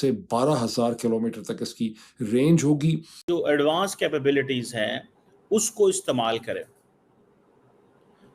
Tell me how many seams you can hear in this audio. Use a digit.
1